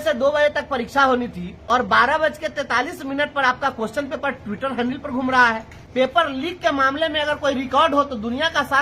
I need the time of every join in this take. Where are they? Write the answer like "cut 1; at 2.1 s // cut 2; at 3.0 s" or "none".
cut 1; at 1.0 s // cut 2; at 6.1 s